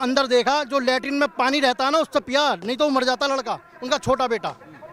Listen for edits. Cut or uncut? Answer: uncut